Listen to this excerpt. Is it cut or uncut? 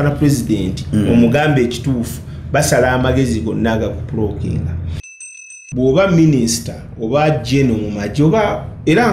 cut